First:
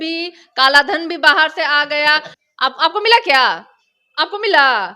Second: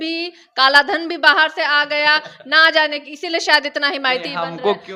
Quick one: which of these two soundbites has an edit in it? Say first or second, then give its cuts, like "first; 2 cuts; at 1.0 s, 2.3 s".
first; 1 cut; at 2.4 s